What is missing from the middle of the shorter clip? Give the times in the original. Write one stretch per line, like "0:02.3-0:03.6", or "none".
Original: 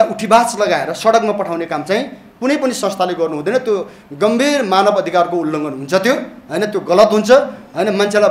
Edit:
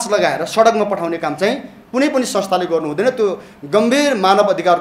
none